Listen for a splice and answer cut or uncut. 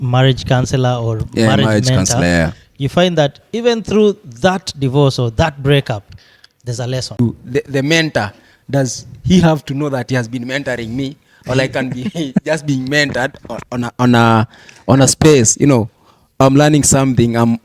cut